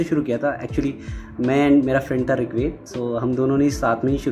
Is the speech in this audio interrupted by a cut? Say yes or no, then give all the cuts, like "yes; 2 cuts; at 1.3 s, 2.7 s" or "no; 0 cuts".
no; 0 cuts